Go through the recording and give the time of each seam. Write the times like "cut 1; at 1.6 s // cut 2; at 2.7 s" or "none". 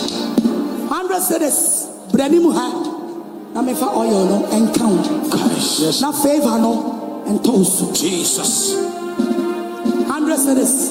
none